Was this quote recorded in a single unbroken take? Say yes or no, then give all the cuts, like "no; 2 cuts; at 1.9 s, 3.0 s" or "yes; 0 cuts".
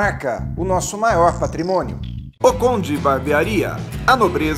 yes; 0 cuts